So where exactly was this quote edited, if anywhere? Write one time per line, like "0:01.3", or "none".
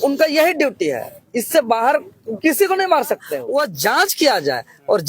0:03.3